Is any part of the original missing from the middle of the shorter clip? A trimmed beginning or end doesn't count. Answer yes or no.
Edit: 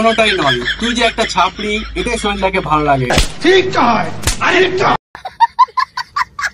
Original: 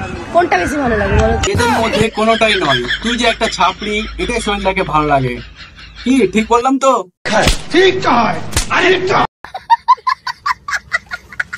yes